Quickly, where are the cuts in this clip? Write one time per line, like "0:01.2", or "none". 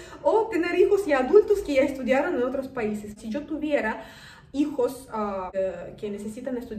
0:03.2
0:05.5